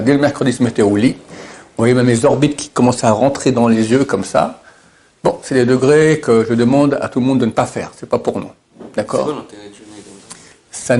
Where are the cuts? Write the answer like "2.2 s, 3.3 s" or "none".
none